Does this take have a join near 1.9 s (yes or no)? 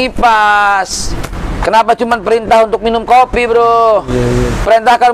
no